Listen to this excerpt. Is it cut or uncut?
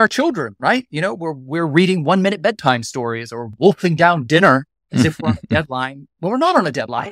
cut